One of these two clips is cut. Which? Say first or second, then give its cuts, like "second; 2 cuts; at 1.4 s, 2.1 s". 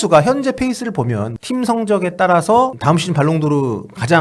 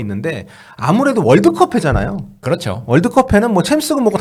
first; 2 cuts; at 1.3 s, 2.8 s